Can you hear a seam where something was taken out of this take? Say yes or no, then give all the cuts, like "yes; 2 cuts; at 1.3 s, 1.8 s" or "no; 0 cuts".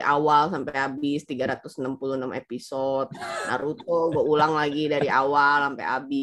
no; 0 cuts